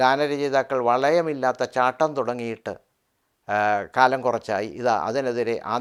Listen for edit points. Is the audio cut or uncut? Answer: uncut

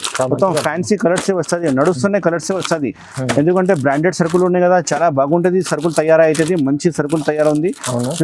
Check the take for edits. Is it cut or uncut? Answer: uncut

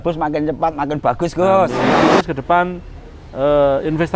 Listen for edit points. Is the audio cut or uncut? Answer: cut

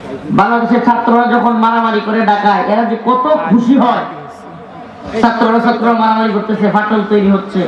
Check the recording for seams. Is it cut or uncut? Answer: uncut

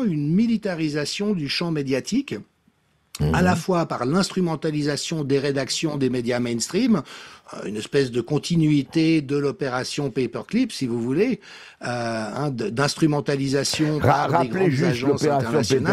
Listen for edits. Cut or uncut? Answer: uncut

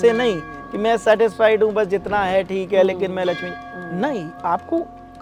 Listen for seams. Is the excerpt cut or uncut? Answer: uncut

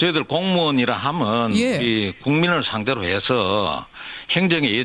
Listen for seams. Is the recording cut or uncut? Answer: uncut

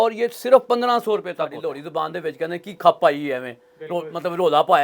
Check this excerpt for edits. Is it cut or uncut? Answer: cut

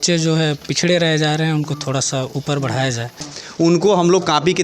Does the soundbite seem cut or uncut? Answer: cut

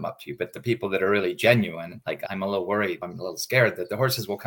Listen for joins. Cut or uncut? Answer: cut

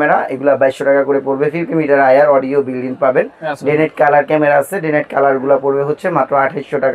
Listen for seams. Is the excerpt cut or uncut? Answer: uncut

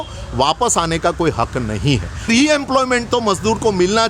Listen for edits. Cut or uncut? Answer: cut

